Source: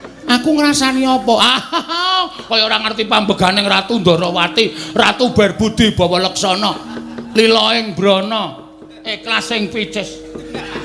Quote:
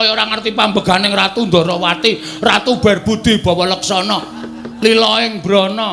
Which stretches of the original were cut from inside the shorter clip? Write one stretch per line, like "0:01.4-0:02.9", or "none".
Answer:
none